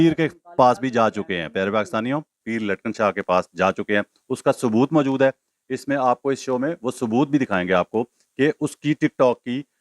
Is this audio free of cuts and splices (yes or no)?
no